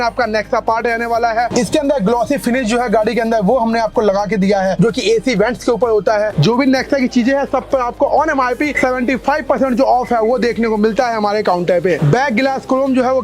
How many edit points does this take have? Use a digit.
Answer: 3